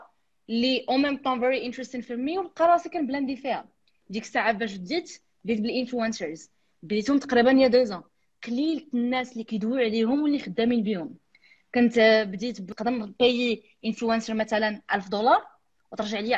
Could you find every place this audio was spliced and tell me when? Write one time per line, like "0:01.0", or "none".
0:12.7